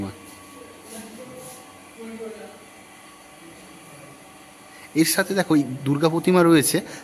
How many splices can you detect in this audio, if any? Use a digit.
0